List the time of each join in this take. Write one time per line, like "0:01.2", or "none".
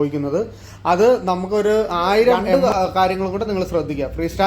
0:02.4